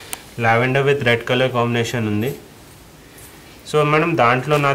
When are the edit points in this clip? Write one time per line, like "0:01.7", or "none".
none